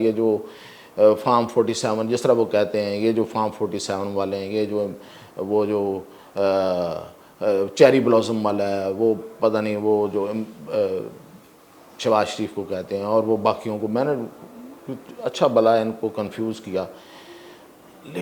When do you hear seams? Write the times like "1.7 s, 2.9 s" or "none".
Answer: none